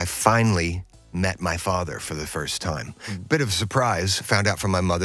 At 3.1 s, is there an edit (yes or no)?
yes